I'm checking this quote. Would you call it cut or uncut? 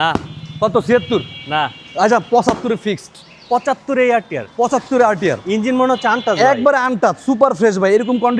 uncut